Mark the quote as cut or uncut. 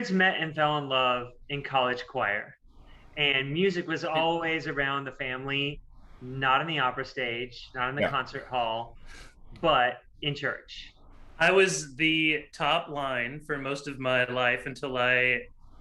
cut